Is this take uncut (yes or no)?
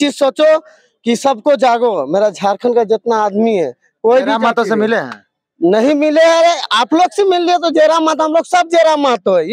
yes